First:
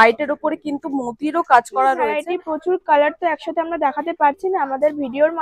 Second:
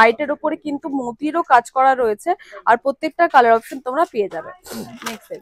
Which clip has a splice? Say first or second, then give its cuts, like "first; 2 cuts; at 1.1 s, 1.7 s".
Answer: first; 1 cut; at 2.2 s